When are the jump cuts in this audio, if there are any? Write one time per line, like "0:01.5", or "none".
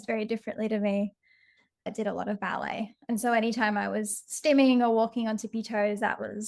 0:01.9